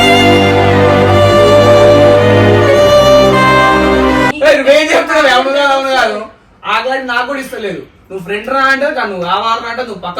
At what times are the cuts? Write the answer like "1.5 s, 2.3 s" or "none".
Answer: 4.3 s